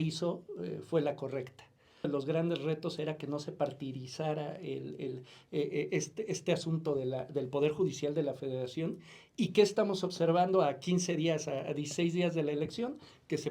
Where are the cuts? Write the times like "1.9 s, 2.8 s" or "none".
2.1 s